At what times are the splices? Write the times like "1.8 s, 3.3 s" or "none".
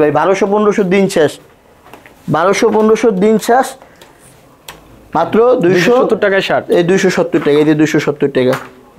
none